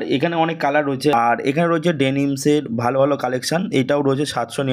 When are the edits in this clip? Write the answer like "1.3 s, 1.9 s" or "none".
1.1 s

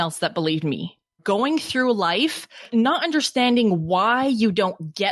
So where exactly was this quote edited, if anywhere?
1.2 s, 2.6 s

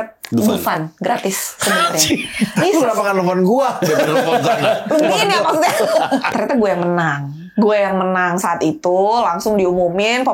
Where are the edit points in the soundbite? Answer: 6.3 s

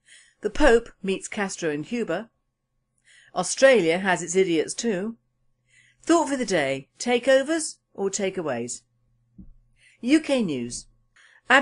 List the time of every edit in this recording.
6.4 s

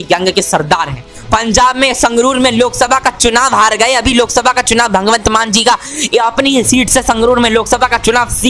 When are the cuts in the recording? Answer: 1.1 s

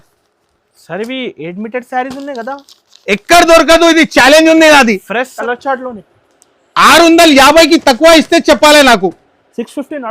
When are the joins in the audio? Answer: 5.4 s

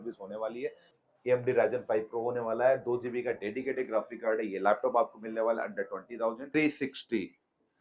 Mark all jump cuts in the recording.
0.9 s, 6.4 s

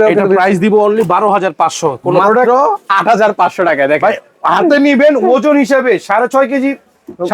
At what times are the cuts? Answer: 2.2 s

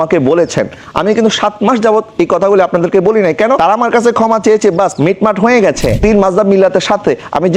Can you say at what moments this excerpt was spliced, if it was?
4.9 s, 6.0 s

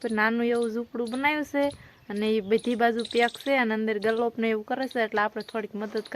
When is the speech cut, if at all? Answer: none

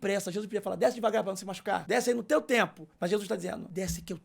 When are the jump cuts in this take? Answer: 1.8 s, 3.4 s

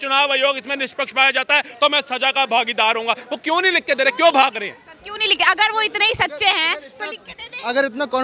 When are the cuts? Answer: none

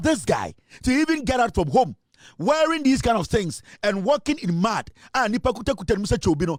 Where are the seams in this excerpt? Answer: none

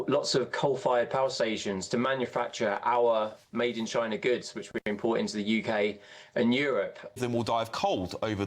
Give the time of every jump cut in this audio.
7.2 s

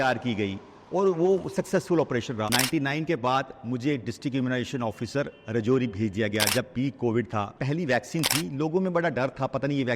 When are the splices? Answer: 2.5 s, 7.6 s

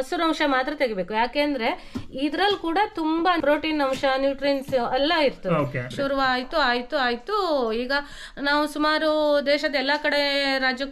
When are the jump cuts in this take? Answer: 3.4 s, 5.9 s

